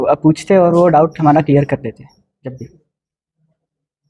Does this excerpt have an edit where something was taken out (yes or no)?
no